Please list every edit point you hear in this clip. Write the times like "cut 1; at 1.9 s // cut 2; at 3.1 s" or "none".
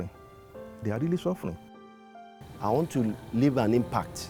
none

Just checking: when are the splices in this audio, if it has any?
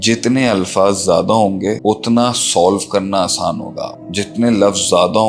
cut 1; at 1.8 s

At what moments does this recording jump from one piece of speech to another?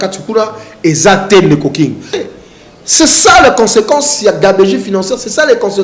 cut 1; at 2.2 s

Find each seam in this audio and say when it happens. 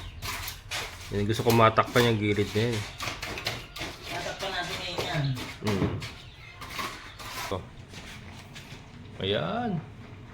cut 1; at 7.5 s

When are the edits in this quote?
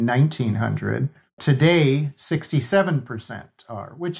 cut 1; at 1.4 s

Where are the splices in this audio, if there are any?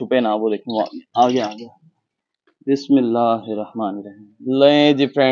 cut 1; at 2.3 s

